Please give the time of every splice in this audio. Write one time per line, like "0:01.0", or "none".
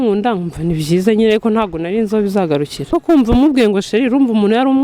0:02.9